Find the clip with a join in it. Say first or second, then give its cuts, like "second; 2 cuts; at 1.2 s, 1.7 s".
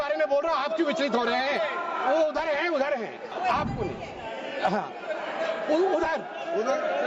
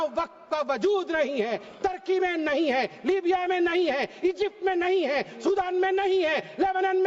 first; 1 cut; at 3.3 s